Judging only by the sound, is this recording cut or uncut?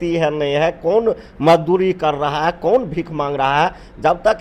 uncut